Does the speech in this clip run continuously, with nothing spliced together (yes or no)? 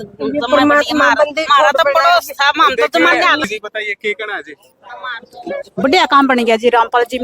no